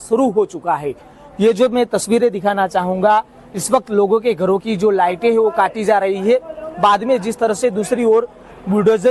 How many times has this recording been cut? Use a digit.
1